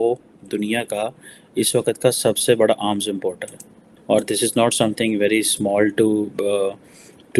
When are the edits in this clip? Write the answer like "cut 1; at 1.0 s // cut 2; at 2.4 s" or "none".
none